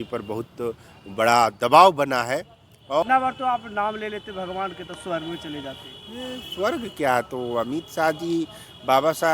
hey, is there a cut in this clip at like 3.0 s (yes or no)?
yes